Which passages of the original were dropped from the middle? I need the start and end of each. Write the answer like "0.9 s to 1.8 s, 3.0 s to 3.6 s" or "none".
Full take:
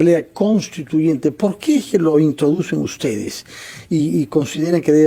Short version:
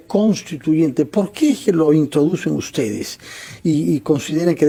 none